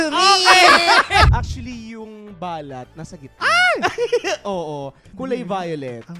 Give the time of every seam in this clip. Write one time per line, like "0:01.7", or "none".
0:01.3
0:03.2